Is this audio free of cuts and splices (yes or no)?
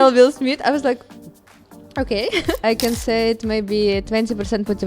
no